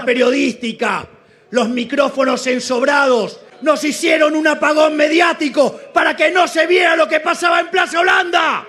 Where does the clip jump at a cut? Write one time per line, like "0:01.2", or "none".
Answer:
0:03.5